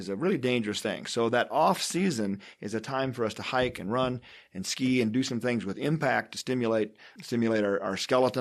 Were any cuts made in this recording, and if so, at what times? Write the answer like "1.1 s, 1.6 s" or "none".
7.1 s